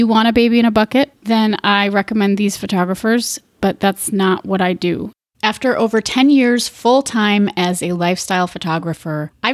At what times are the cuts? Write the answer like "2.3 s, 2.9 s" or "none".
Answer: 1.2 s, 5.1 s